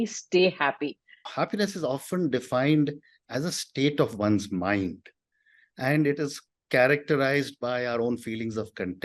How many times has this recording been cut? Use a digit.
1